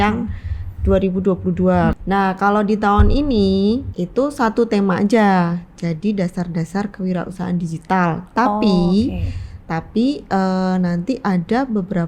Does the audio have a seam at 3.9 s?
yes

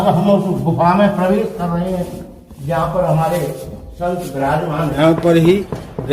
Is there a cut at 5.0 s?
yes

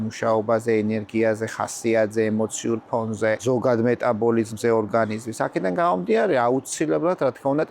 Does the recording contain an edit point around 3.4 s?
yes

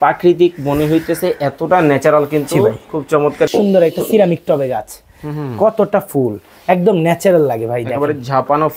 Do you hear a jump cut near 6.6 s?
no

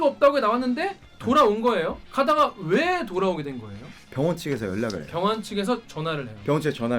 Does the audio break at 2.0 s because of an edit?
yes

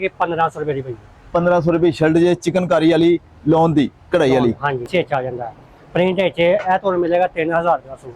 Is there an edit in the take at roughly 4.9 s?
yes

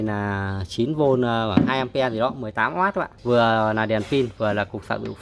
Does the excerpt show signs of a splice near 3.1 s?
yes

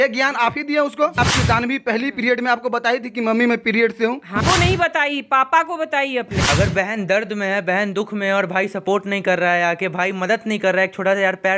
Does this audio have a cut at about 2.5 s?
no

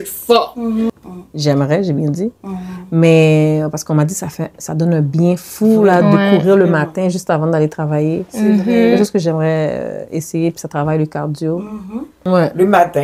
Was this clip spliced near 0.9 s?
yes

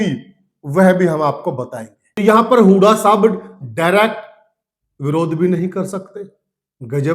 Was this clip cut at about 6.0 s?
no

